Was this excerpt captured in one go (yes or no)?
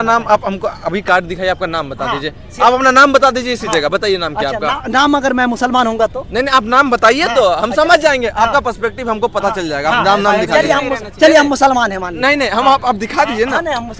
yes